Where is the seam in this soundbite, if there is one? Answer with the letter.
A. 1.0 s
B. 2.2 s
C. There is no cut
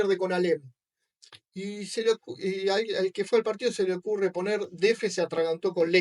C